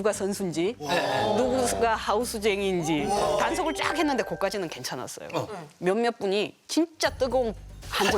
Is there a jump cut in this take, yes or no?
yes